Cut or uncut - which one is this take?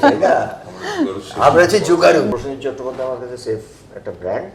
cut